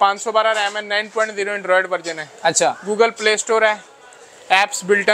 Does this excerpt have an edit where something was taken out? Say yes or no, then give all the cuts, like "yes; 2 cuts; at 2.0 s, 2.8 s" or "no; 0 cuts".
no; 0 cuts